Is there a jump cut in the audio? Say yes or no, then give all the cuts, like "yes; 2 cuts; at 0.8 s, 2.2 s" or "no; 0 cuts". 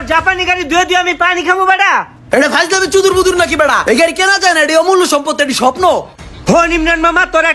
no; 0 cuts